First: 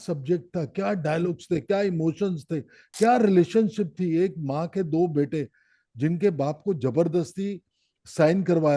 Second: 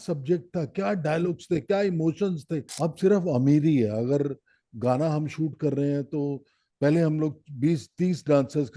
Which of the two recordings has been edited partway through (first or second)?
second